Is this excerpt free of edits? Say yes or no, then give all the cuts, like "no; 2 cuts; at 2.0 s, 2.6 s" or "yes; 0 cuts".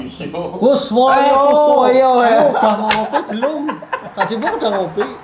yes; 0 cuts